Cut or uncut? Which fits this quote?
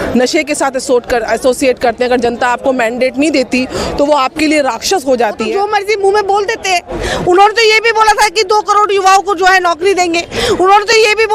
cut